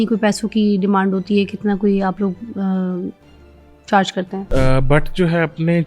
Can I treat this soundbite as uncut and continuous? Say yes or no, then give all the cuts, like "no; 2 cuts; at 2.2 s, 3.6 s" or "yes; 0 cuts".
no; 1 cut; at 4.4 s